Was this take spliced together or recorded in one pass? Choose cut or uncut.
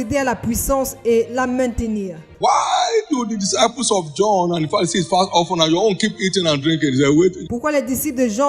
cut